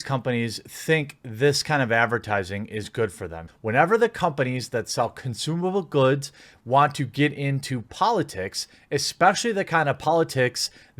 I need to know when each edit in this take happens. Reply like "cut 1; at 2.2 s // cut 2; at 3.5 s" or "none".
cut 1; at 3.3 s